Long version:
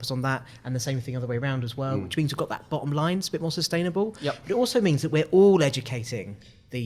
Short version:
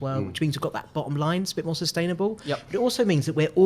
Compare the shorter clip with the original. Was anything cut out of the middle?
no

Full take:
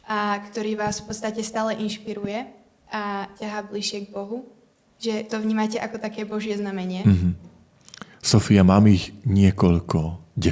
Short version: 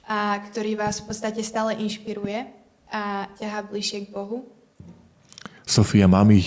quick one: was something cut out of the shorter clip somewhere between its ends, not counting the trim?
yes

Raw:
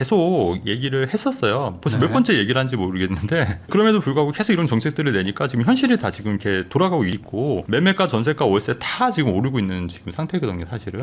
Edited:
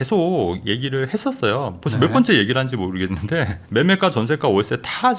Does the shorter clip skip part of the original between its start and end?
yes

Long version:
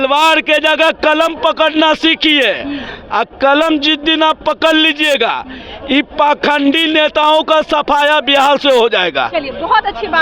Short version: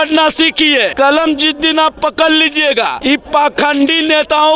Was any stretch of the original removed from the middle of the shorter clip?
yes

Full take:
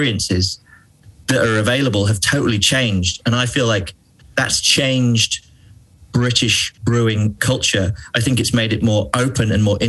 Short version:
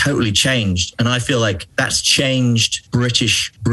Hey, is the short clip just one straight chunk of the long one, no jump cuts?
no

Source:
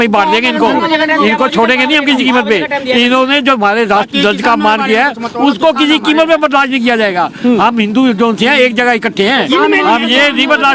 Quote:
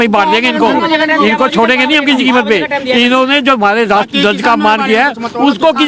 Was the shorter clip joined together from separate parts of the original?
no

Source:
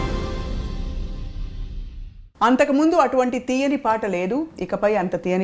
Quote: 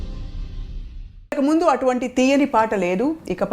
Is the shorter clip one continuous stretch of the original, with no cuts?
no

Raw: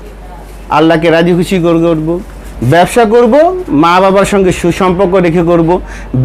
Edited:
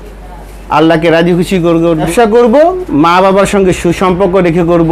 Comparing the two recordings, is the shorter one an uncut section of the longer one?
no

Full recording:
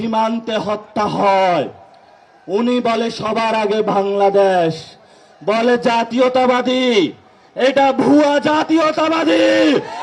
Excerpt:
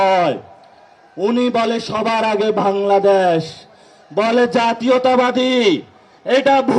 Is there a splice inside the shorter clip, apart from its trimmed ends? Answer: no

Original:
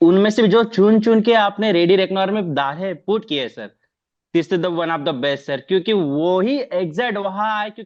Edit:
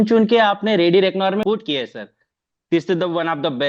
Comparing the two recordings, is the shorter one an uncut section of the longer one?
no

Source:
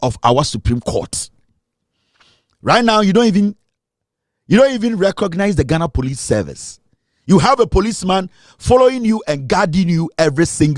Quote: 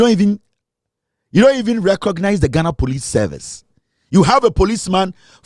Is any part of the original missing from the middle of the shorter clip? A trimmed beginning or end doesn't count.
no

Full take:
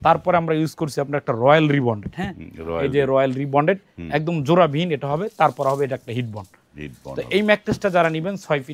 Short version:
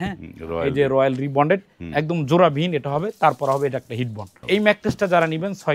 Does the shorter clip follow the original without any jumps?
no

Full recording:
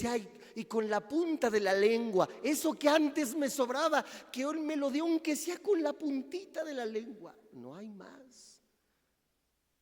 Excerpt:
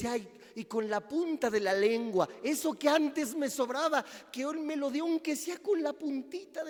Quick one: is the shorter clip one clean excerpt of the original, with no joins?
yes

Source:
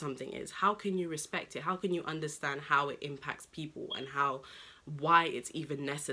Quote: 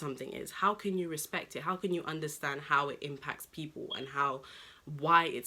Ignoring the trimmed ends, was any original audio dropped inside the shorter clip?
no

